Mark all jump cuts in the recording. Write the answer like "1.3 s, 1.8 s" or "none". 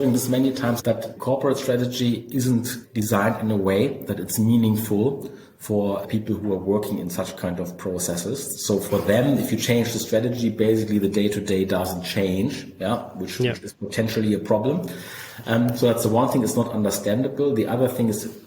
1.0 s, 2.8 s, 6.1 s